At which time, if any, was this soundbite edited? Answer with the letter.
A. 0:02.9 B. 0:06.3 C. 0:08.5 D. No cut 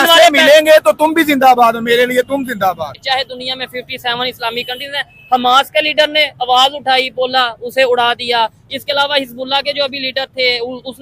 A